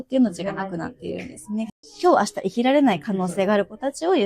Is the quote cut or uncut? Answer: cut